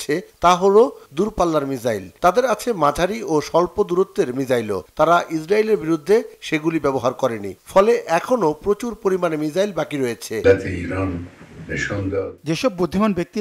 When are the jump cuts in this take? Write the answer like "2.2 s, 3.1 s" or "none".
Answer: 10.4 s